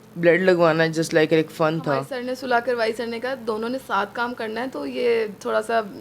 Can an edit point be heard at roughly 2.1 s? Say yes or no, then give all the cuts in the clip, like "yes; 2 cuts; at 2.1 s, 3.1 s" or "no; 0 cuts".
yes; 1 cut; at 2.1 s